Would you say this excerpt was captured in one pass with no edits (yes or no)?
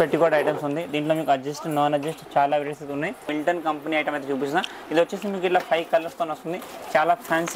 no